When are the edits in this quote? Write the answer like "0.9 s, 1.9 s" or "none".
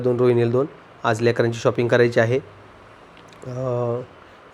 none